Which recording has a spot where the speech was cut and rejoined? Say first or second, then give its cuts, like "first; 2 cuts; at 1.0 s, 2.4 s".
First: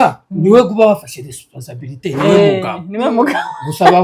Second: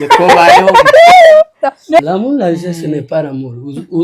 second; 1 cut; at 2.0 s